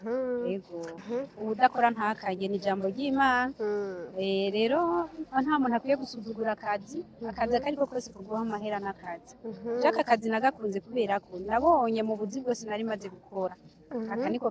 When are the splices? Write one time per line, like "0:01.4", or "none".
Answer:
0:01.0